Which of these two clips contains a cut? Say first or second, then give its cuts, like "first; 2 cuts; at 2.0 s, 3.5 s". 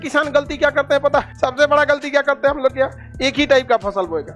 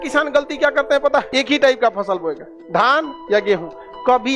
second; 1 cut; at 1.3 s